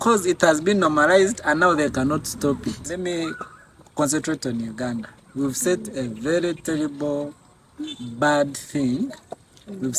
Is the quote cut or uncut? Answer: cut